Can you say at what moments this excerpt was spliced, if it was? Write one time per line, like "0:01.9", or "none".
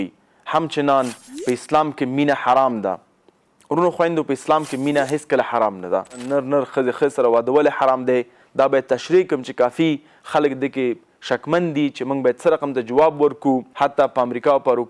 0:06.2
0:13.7